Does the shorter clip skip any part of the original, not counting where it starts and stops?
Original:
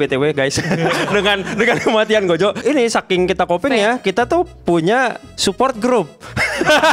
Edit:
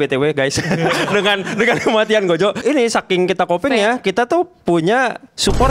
no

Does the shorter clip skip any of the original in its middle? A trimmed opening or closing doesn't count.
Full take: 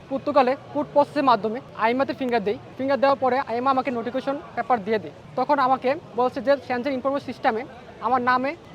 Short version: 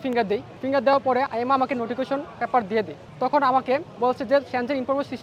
no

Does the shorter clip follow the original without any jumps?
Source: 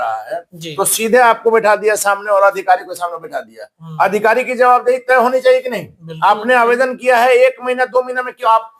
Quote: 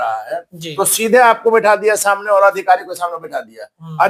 yes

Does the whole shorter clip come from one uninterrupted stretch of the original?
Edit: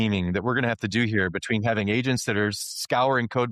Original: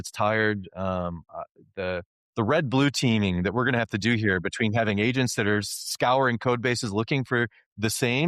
yes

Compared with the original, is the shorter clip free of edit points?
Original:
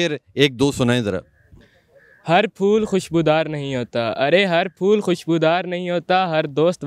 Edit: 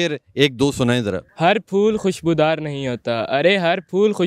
no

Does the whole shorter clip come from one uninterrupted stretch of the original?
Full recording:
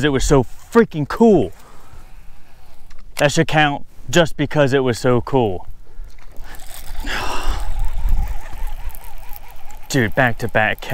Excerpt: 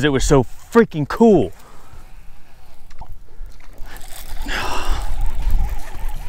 no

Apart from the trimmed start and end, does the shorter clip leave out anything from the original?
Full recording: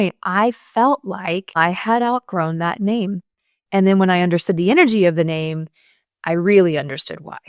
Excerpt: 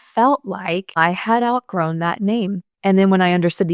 yes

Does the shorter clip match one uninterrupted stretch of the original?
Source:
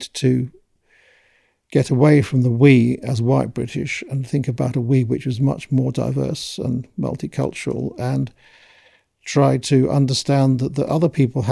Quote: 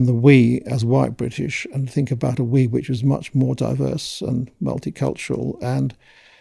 yes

